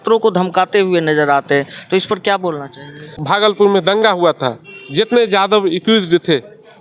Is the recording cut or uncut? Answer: cut